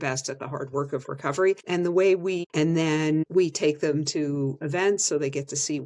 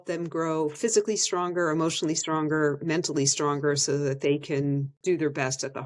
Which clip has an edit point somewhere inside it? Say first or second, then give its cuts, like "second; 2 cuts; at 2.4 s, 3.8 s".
first; 3 cuts; at 1.6 s, 2.4 s, 3.3 s